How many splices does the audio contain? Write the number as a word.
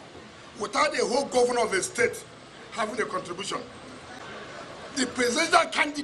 one